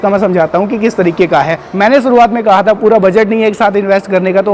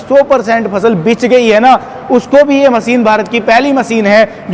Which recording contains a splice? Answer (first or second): first